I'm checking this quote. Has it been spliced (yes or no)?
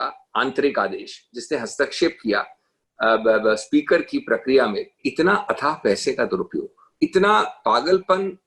yes